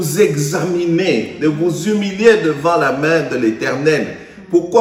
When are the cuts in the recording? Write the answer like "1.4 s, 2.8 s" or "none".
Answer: none